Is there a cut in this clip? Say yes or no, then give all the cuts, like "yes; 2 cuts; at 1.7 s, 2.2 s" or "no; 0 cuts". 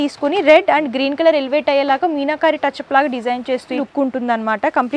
yes; 1 cut; at 3.8 s